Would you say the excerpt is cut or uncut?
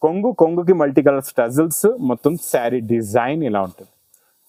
uncut